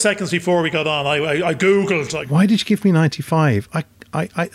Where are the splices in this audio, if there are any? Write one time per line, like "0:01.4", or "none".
0:02.1